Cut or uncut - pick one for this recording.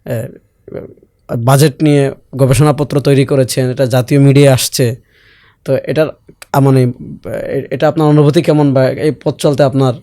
uncut